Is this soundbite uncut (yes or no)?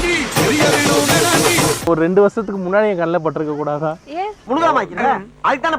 no